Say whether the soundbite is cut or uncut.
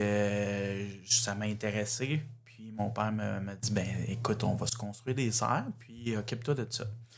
uncut